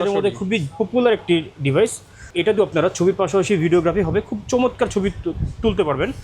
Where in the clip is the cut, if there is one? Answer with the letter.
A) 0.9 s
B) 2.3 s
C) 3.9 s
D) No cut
B